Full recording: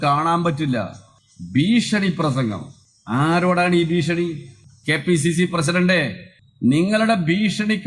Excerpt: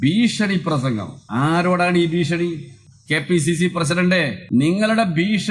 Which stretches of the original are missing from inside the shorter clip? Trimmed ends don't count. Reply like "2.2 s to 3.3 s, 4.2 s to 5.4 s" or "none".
2.7 s to 2.9 s, 6.1 s to 6.5 s